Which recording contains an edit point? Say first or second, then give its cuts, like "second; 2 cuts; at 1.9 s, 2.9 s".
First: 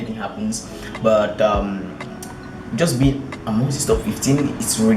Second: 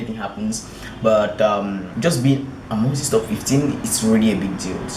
second; 1 cut; at 1.9 s